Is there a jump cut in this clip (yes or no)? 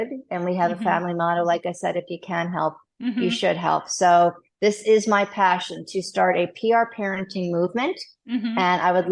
no